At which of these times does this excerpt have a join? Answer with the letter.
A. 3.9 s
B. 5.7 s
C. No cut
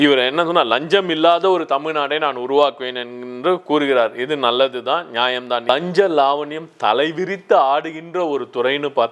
B